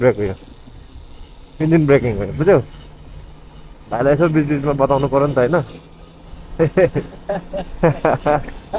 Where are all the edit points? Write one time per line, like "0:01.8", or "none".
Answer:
none